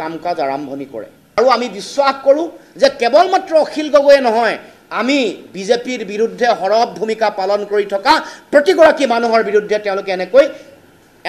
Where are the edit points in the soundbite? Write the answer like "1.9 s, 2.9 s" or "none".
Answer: 1.3 s

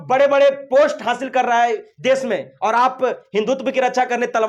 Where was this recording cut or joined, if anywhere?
none

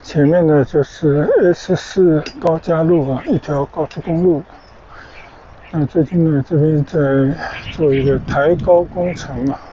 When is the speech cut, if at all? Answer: none

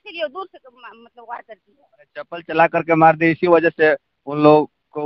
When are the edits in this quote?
none

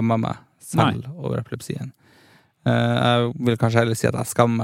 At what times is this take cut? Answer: none

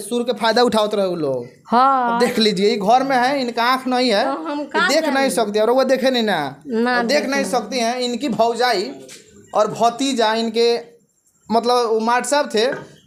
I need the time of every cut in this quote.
none

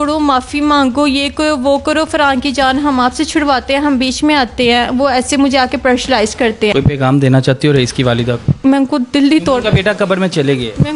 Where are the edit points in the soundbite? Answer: 6.7 s, 8.6 s

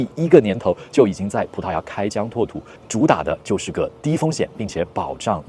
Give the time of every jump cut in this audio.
2.8 s

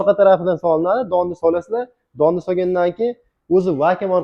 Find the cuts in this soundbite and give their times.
none

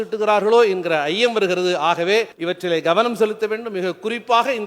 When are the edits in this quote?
2.4 s

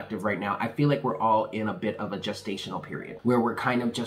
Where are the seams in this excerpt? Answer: 3.1 s

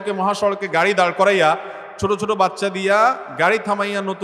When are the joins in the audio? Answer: none

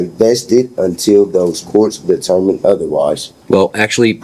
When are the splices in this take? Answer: 3.3 s

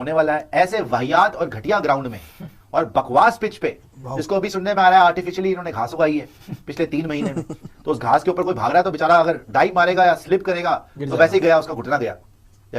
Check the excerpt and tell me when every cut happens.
none

